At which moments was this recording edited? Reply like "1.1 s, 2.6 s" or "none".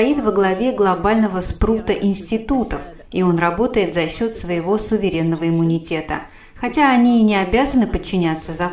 none